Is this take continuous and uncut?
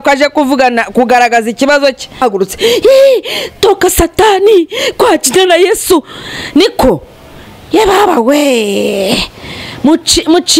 no; 1 cut; at 2.2 s

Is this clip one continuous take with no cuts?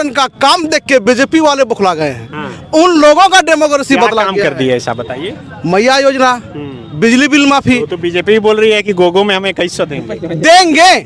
yes; 0 cuts

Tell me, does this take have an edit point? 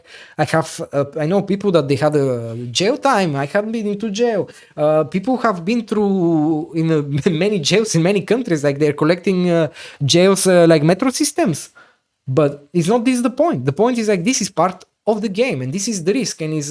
no; 0 cuts

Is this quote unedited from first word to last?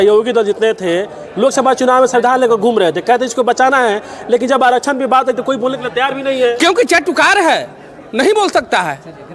yes; 0 cuts

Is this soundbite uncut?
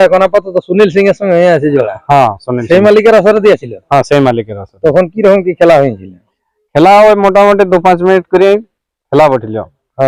yes; 0 cuts

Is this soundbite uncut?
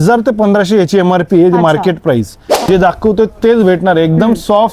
no; 1 cut; at 2.6 s

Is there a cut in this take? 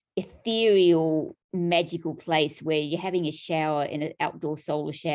yes; 1 cut; at 1.4 s

